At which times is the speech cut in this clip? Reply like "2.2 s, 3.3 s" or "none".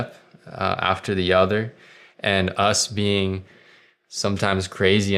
none